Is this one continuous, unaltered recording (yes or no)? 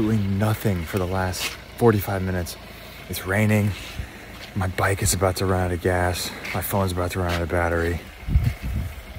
yes